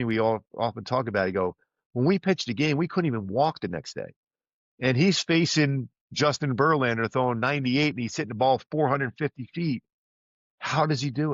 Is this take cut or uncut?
uncut